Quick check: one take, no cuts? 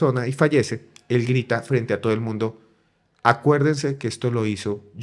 yes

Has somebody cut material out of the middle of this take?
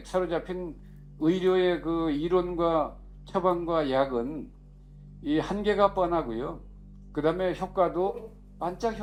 no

